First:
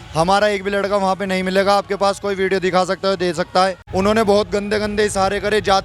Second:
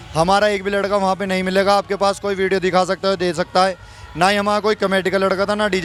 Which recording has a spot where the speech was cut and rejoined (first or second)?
first